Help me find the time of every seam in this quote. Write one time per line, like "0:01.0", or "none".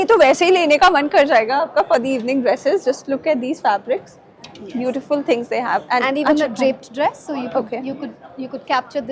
none